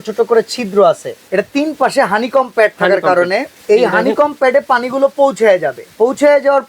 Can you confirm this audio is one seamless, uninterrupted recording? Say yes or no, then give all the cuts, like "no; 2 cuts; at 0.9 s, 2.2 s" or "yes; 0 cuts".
no; 3 cuts; at 1.1 s, 3.5 s, 5.8 s